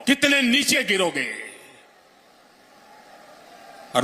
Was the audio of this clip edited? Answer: no; 0 cuts

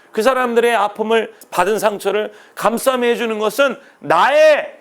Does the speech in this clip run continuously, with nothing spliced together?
no; 1 cut; at 1.4 s

